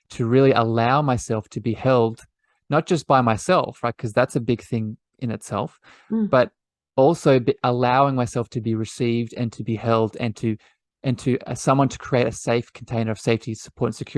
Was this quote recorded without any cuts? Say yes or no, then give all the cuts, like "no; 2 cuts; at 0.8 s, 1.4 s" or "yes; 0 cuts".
yes; 0 cuts